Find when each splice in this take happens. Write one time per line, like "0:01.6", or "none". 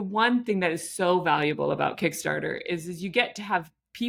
none

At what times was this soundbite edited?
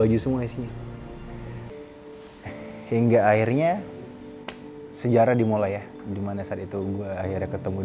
0:01.7

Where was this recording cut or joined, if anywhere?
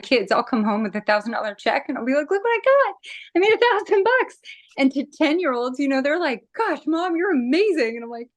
none

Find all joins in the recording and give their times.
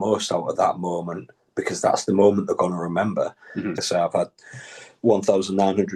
0:03.8

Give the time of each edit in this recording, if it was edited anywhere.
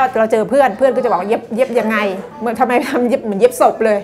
0:02.3

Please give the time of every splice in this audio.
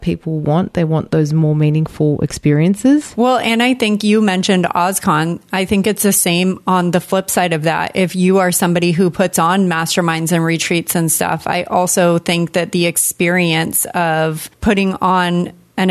0:03.1

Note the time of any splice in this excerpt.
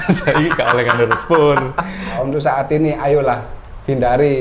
0:02.2

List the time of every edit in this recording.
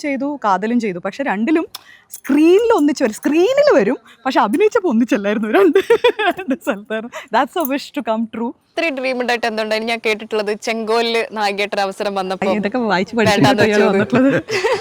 0:08.6

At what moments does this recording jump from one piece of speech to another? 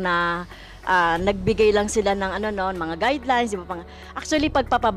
none

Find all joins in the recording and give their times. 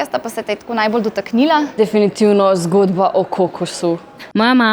0:01.7

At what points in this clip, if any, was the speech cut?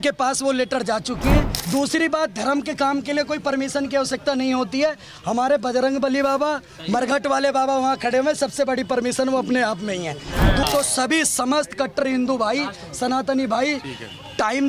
0:01.6
0:10.6

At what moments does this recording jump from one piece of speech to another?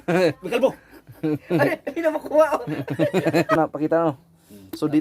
0:03.6

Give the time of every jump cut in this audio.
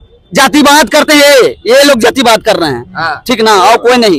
none

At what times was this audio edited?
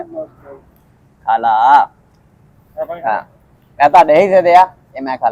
none

